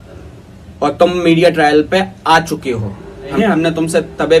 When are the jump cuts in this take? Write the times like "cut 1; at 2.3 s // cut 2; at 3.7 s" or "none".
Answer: cut 1; at 3.3 s